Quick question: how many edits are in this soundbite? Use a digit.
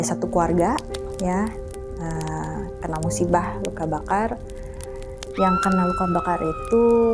0